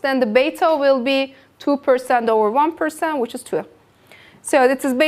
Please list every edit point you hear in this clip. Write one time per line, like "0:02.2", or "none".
0:01.7